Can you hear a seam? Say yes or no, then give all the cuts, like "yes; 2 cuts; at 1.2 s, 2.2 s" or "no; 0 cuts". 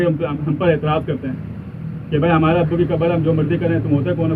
no; 0 cuts